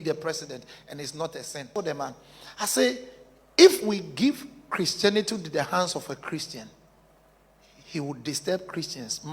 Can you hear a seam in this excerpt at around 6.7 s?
no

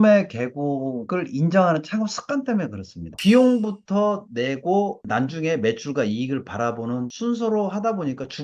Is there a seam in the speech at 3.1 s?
yes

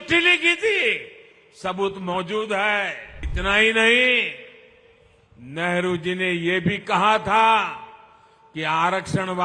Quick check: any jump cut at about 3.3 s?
yes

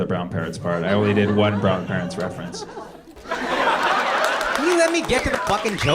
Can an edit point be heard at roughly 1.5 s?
no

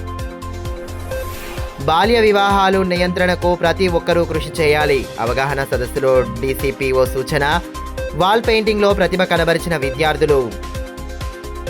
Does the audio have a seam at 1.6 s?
yes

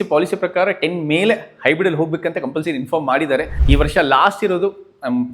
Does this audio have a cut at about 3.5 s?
yes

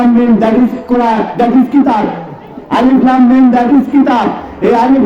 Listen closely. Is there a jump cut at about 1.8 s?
no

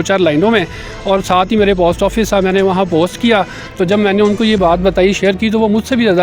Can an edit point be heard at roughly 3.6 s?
yes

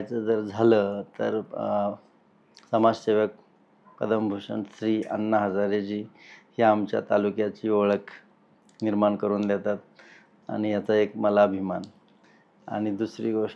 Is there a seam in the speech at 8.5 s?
no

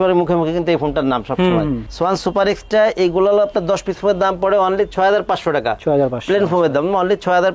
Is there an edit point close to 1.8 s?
no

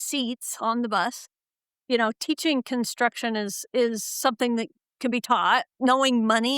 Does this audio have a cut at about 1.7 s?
yes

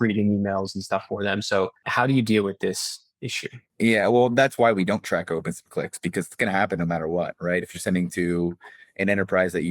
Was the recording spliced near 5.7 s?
no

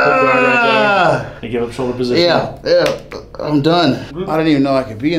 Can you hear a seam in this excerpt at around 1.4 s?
yes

